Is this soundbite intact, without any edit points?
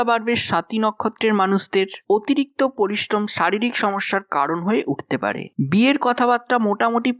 yes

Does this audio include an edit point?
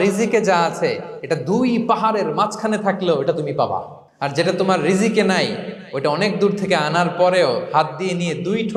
no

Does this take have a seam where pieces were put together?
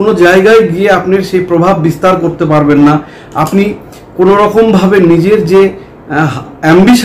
no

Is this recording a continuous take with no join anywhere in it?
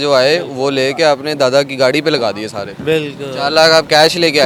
yes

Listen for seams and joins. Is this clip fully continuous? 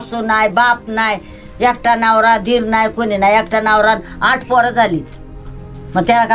yes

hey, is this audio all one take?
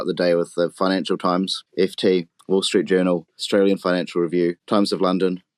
no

